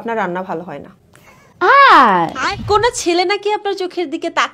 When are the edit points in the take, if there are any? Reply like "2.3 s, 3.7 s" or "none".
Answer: 2.6 s